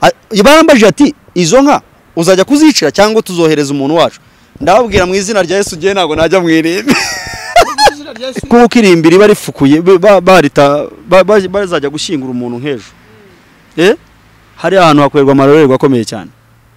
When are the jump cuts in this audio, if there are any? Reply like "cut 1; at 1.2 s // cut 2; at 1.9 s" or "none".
cut 1; at 8.3 s